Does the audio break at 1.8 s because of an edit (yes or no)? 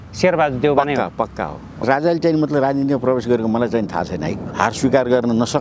yes